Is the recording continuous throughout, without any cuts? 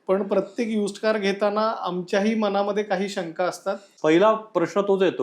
no; 1 cut; at 3.9 s

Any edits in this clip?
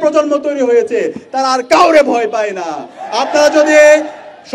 no; 0 cuts

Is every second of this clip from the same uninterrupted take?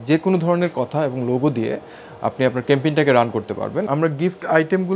no; 1 cut; at 3.9 s

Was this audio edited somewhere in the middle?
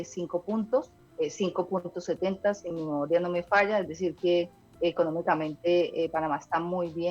yes; 3 cuts; at 1.0 s, 2.7 s, 4.6 s

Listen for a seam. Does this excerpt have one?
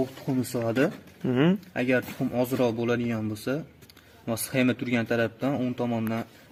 no; 0 cuts

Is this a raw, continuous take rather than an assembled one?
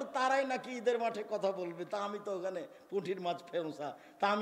yes; 0 cuts

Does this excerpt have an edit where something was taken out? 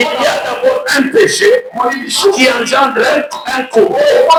no; 0 cuts

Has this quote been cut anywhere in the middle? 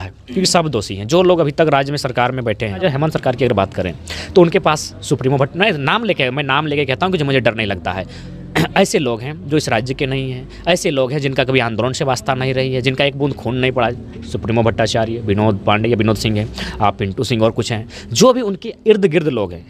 yes; 1 cut; at 2.8 s

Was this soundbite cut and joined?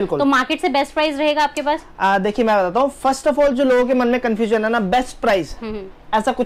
no; 0 cuts

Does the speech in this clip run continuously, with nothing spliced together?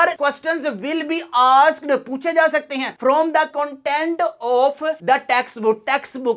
yes; 0 cuts

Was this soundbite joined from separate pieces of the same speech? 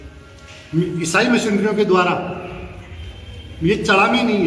no; 0 cuts

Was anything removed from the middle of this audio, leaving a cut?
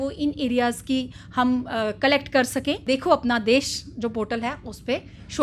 yes; 1 cut; at 2.8 s

